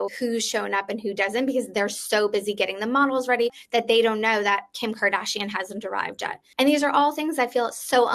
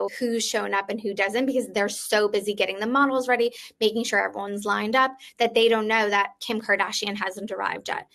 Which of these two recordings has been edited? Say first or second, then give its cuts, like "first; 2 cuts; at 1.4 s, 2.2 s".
first; 2 cuts; at 3.6 s, 6.4 s